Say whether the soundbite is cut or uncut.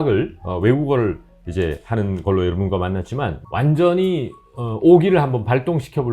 cut